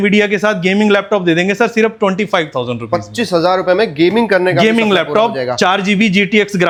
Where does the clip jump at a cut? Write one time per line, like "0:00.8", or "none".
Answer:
none